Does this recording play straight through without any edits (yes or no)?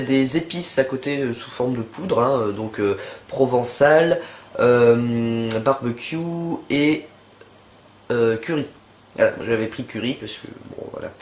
no